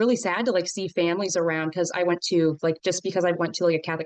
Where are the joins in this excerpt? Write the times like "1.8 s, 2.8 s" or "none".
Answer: none